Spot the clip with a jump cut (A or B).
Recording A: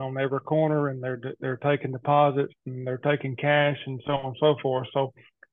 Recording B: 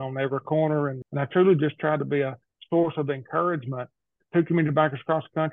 B